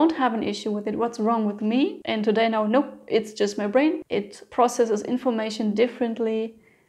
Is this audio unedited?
no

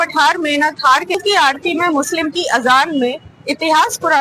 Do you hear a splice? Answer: yes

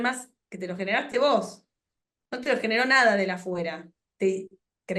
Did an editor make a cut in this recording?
no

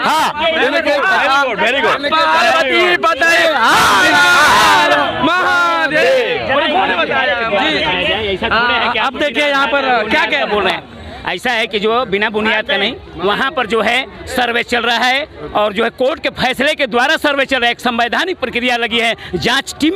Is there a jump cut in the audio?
no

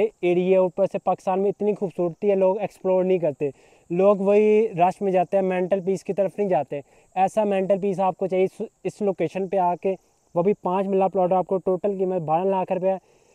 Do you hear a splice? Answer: no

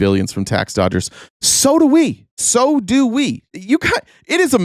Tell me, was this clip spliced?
no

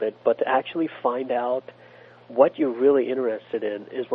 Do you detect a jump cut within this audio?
no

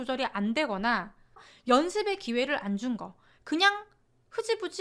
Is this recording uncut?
no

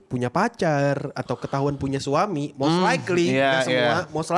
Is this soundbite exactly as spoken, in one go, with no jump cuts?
yes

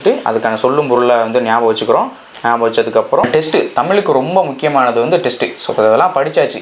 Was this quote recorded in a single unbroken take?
no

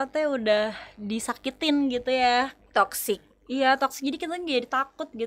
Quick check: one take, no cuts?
yes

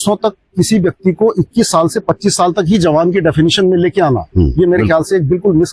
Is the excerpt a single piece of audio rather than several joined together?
yes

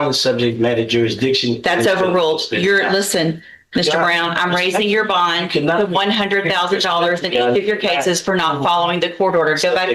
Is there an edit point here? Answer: no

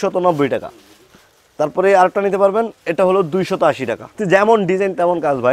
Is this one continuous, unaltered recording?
no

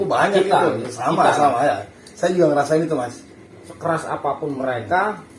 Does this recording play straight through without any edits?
no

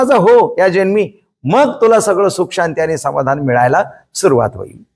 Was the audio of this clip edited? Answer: no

